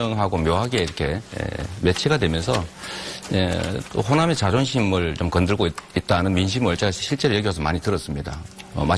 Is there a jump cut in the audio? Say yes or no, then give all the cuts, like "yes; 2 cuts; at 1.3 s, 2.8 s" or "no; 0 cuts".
no; 0 cuts